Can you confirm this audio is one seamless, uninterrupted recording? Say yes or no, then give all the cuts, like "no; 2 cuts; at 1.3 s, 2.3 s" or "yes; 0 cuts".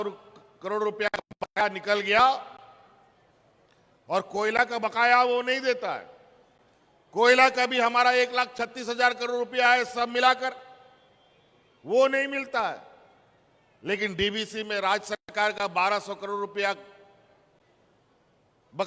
yes; 0 cuts